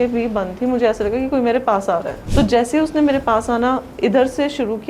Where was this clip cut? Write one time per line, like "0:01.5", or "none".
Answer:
0:02.2